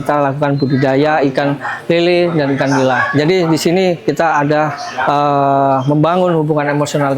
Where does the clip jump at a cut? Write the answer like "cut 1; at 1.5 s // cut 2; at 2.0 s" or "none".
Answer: none